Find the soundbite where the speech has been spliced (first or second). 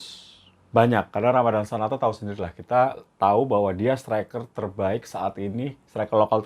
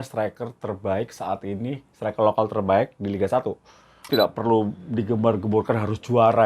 second